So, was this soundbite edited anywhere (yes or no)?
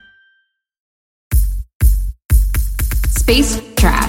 yes